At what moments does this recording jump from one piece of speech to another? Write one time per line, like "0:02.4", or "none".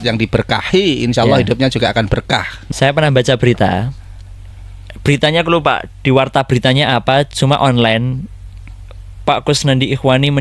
0:02.5